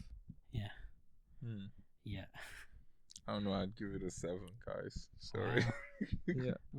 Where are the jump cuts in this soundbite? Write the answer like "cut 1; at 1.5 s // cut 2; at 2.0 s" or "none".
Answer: none

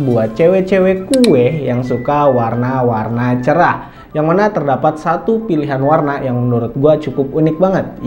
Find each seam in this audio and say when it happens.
none

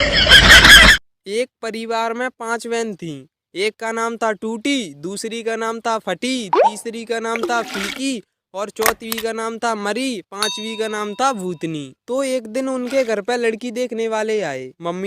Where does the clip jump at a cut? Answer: cut 1; at 0.9 s

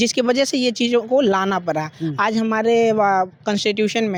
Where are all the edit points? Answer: none

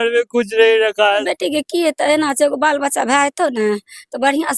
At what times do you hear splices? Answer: cut 1; at 1.3 s

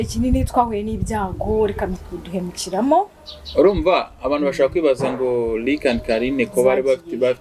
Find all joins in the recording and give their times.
cut 1; at 2.0 s

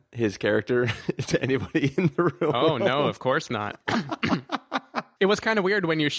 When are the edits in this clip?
cut 1; at 5.0 s

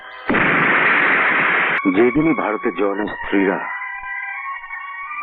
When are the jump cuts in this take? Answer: cut 1; at 1.8 s

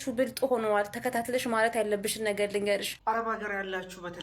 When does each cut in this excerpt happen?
cut 1; at 3.0 s

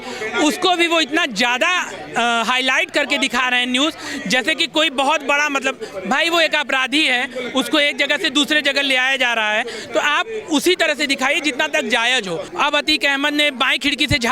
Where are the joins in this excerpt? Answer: cut 1; at 12.5 s

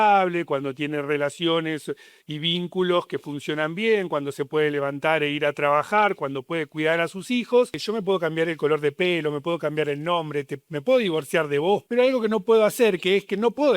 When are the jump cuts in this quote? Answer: cut 1; at 7.8 s // cut 2; at 11.8 s

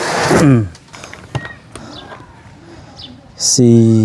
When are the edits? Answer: cut 1; at 1.0 s

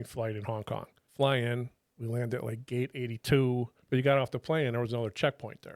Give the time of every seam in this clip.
cut 1; at 1.0 s // cut 2; at 3.8 s

